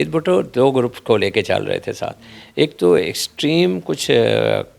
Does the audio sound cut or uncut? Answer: uncut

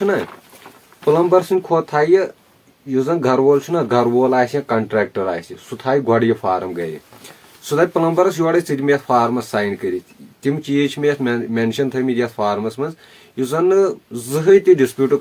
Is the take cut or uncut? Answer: uncut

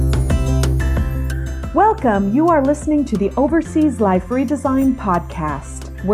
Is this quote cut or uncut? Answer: cut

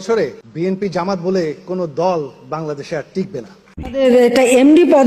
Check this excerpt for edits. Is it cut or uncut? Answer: cut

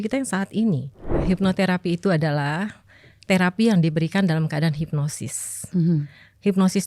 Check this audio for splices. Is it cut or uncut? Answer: cut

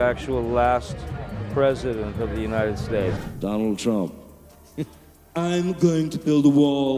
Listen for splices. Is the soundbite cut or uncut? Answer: cut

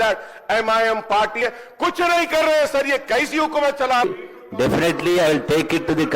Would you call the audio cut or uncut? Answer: cut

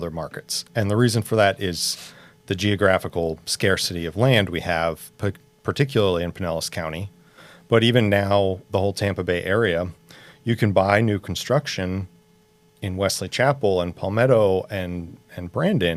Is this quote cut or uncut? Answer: uncut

